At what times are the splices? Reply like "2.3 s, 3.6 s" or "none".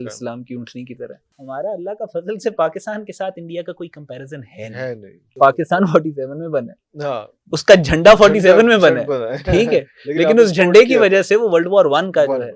1.3 s, 5.3 s